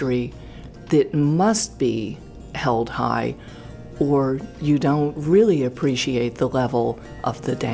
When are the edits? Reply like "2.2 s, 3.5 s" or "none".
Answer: 5.2 s